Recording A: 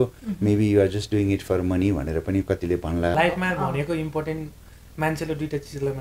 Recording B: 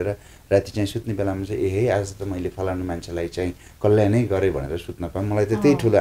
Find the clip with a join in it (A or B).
A